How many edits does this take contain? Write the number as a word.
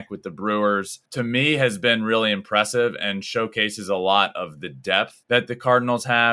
two